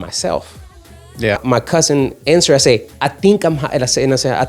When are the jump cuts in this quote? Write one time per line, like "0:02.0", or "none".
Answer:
0:01.4